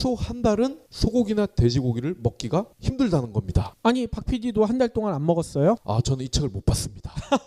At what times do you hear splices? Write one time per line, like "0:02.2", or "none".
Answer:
0:06.0